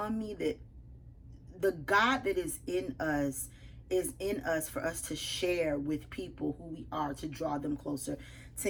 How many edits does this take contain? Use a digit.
0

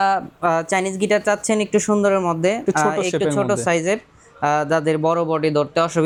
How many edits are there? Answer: 0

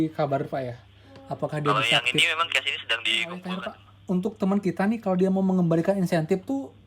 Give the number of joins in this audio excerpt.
1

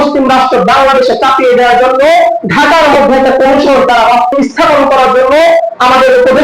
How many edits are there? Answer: 1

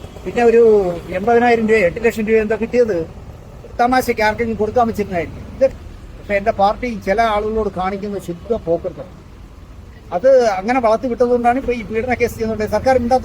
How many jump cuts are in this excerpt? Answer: 1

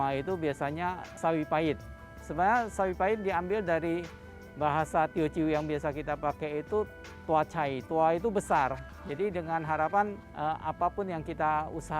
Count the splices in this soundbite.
3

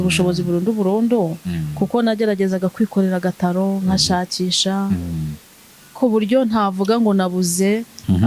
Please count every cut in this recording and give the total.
0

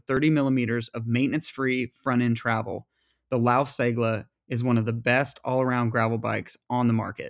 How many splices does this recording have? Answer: 0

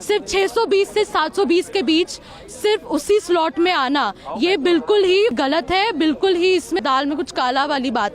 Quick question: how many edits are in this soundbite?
2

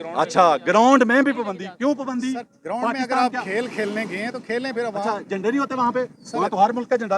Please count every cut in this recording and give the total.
0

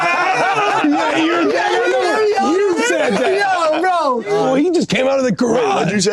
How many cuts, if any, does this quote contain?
1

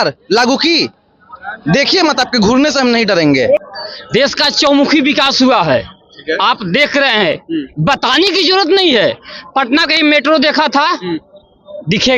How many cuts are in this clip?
1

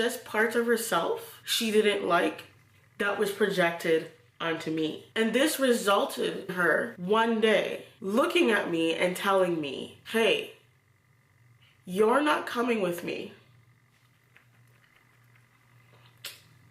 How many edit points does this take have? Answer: 2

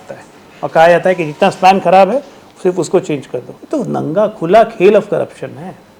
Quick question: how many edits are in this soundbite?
1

